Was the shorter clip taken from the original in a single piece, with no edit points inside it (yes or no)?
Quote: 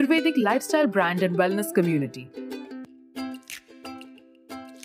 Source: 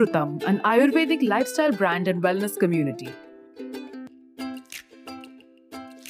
no